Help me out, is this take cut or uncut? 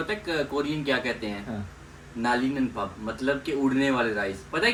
uncut